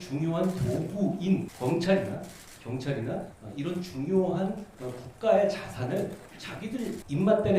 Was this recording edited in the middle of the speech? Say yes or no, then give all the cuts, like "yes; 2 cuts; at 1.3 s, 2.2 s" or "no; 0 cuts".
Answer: yes; 3 cuts; at 1.5 s, 3.4 s, 6.6 s